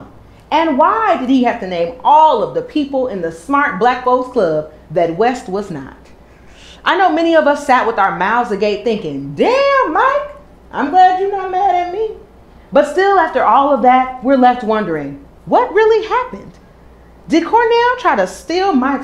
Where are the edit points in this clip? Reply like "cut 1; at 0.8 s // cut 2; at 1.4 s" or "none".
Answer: cut 1; at 8.0 s